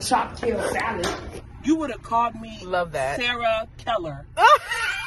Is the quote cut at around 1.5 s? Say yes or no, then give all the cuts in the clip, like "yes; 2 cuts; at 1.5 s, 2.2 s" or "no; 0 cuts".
yes; 1 cut; at 1.5 s